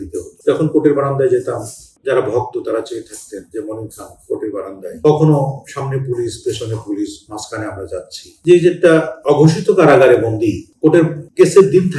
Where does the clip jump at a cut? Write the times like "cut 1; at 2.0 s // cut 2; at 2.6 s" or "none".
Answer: none